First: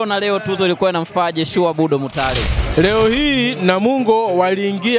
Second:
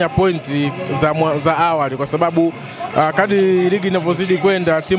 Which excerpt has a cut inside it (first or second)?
first